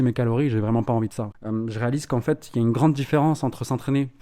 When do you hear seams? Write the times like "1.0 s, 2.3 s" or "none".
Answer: 1.3 s